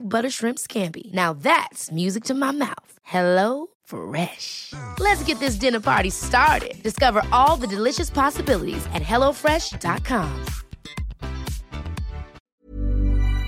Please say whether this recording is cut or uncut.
cut